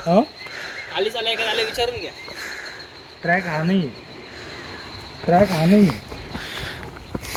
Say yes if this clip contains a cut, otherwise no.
no